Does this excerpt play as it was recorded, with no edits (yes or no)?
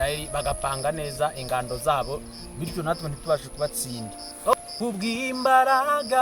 no